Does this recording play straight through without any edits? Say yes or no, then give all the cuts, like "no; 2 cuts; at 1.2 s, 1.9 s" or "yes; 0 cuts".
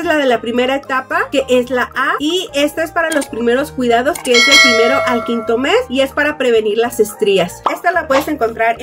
yes; 0 cuts